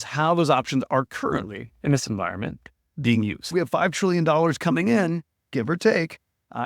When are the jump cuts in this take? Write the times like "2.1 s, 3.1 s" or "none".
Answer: 3.4 s